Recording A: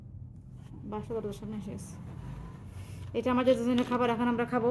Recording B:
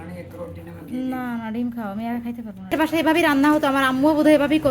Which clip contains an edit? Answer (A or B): B